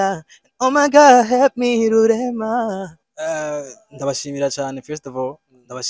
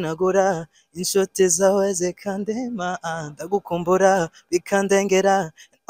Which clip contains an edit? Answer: first; 1 cut; at 3.0 s

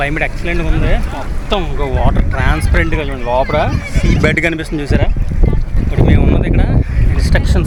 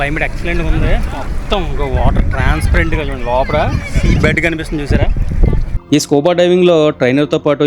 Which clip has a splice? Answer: second; 1 cut; at 5.7 s

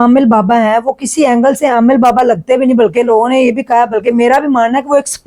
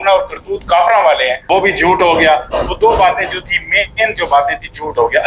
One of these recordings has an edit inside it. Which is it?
second; 1 cut; at 1.4 s

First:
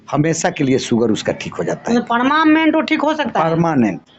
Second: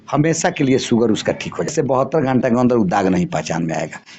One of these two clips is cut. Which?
second; 1 cut; at 1.7 s

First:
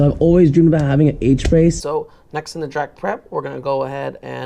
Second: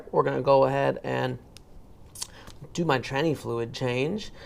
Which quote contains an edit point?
first; 1 cut; at 1.8 s

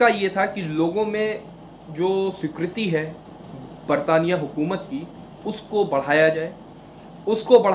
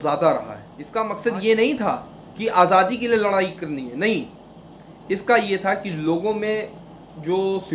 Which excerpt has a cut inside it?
second; 1 cut; at 0.9 s

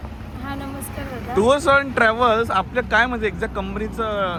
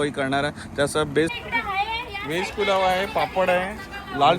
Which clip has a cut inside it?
second; 1 cut; at 1.3 s

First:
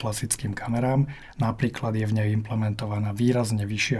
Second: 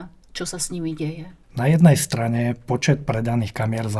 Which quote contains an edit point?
first; 1 cut; at 1.2 s

